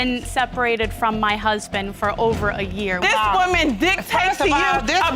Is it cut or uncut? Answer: cut